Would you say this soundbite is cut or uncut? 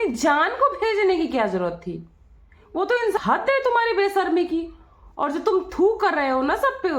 cut